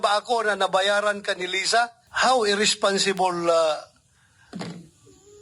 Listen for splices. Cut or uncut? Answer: cut